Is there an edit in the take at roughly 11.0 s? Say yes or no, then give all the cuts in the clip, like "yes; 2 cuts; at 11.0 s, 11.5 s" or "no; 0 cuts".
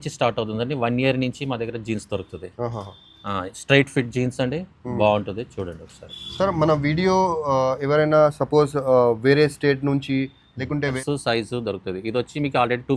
yes; 1 cut; at 11.0 s